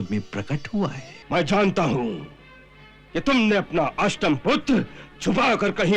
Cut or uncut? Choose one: cut